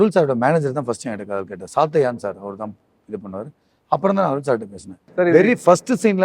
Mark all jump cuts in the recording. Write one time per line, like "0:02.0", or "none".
0:05.0